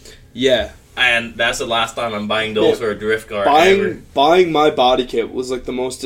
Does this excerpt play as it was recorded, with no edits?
yes; 0 cuts

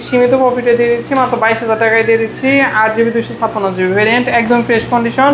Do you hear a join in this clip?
no; 0 cuts

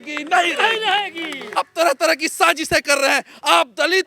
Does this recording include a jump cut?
yes; 1 cut; at 1.4 s

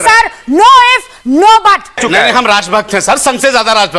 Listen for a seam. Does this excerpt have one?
yes; 1 cut; at 2.0 s

